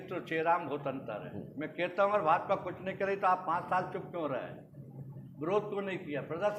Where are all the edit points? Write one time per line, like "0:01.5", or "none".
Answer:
none